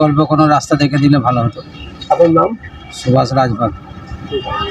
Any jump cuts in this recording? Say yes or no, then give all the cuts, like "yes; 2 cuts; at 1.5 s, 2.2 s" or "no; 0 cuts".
no; 0 cuts